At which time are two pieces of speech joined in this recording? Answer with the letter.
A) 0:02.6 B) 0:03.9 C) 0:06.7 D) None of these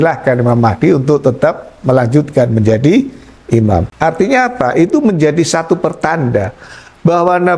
B